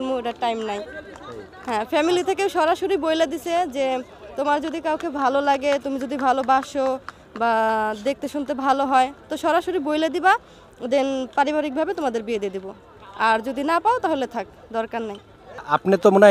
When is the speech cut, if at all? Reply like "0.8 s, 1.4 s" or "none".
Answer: none